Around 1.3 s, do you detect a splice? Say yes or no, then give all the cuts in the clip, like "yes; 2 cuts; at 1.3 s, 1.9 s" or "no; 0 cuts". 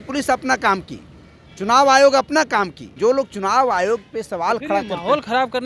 no; 1 cut; at 2.9 s